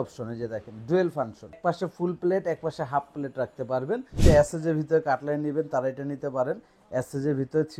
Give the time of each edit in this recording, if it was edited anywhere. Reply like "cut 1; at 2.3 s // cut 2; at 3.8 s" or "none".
cut 1; at 1.6 s // cut 2; at 4.2 s